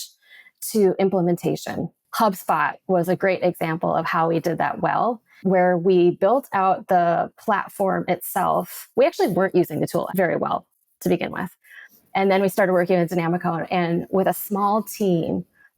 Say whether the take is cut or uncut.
cut